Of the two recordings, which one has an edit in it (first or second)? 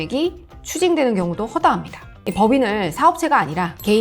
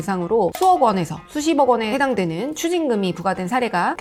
first